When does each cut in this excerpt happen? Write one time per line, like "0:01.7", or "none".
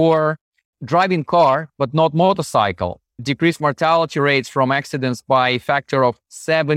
none